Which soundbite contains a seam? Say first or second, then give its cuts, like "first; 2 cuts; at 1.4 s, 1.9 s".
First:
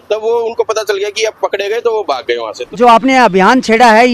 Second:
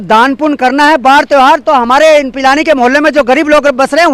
first; 1 cut; at 2.6 s